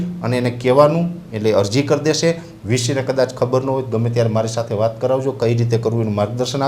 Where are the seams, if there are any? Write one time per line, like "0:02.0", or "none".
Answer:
none